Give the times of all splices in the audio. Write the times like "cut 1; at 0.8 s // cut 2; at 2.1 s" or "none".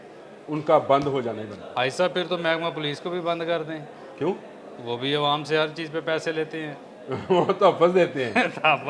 none